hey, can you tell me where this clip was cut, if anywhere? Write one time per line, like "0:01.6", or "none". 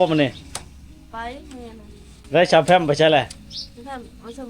0:02.1